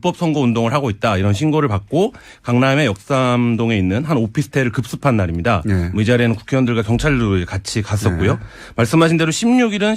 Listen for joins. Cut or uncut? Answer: cut